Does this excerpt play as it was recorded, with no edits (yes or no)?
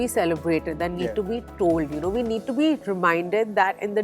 yes